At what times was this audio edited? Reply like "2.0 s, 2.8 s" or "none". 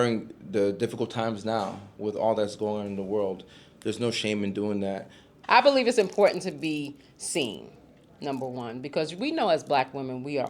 5.4 s